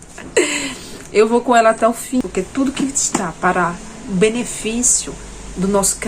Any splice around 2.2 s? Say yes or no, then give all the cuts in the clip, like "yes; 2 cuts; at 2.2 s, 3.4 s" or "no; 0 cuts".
yes; 1 cut; at 2.2 s